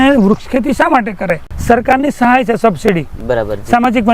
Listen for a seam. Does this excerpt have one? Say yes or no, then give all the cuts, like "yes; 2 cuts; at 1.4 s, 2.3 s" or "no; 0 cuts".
yes; 1 cut; at 1.5 s